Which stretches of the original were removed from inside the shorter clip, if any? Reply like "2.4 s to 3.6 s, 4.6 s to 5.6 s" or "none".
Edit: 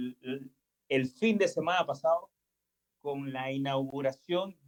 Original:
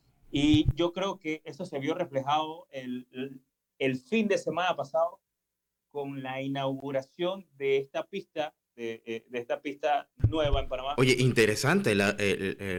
none